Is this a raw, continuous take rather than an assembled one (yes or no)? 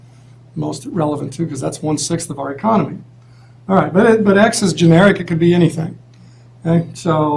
yes